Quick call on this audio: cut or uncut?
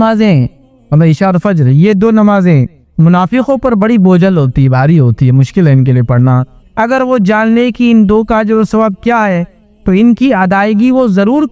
uncut